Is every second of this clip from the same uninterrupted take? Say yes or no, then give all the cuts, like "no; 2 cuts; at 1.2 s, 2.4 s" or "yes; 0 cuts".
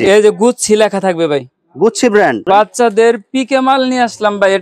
no; 1 cut; at 2.4 s